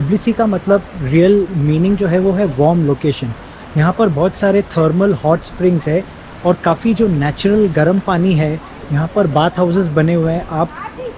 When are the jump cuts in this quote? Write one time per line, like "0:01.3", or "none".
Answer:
none